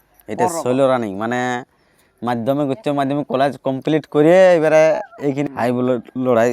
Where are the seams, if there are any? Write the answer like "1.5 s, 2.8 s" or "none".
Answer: 5.5 s